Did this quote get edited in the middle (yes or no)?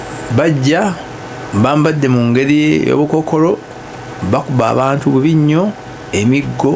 no